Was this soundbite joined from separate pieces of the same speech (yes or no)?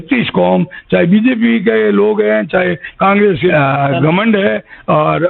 yes